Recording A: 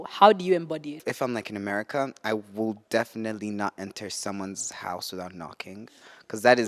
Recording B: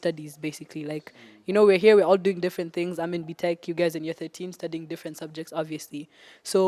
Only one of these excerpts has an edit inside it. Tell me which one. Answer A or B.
A